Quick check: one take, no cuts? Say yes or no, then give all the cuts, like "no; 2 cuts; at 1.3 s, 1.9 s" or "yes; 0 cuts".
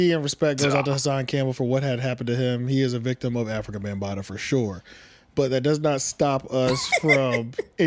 yes; 0 cuts